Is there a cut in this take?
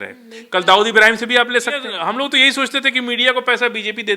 yes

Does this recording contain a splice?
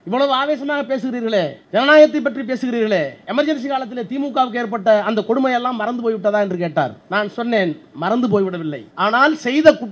yes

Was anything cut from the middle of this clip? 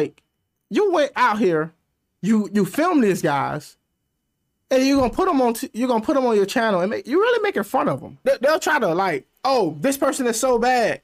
yes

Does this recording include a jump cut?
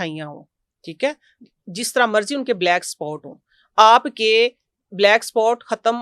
no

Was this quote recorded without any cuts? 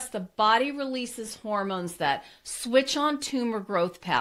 yes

